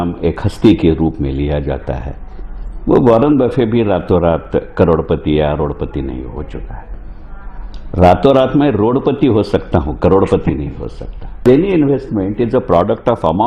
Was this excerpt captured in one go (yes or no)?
no